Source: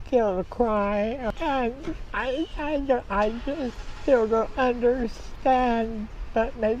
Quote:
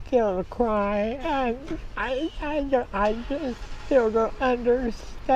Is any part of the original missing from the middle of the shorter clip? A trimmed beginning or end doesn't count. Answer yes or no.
yes